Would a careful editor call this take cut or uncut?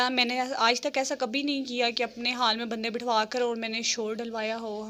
uncut